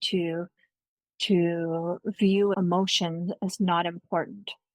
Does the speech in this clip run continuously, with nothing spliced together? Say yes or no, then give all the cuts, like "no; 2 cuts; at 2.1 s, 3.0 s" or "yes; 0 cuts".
no; 1 cut; at 2.5 s